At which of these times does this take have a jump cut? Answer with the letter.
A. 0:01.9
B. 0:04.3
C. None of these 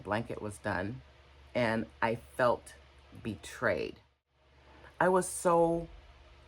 B